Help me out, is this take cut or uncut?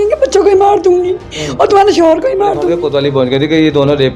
cut